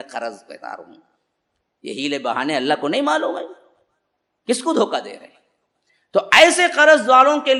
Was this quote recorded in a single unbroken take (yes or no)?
yes